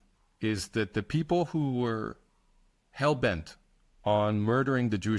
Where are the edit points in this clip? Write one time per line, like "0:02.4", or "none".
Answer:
none